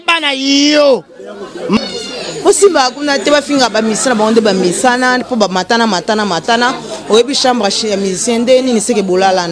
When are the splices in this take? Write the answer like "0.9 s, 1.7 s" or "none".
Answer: 1.8 s